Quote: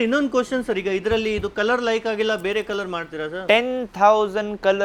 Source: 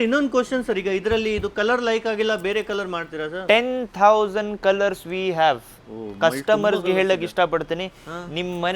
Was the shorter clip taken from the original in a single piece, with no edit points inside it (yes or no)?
yes